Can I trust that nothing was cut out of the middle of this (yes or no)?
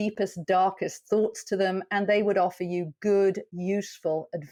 yes